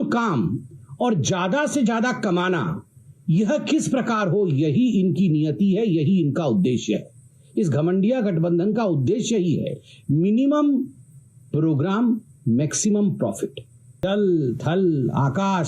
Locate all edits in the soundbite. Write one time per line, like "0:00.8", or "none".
0:14.0